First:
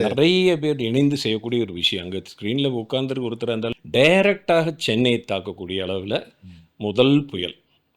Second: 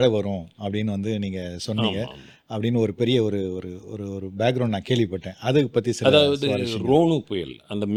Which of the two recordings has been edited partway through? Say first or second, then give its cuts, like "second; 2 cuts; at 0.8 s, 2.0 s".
first; 1 cut; at 3.7 s